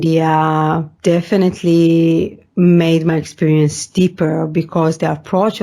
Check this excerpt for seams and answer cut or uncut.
cut